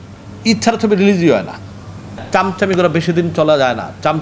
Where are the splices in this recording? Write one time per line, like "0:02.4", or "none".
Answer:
0:02.2